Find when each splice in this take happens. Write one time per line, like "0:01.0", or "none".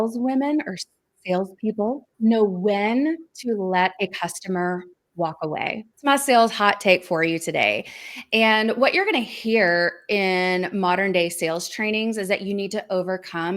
0:02.1
0:05.9